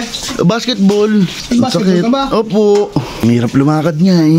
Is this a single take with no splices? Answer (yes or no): no